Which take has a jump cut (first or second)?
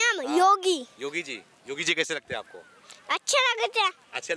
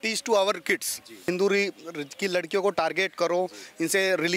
second